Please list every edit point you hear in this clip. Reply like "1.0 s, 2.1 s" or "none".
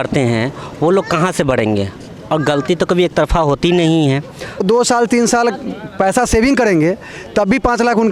4.6 s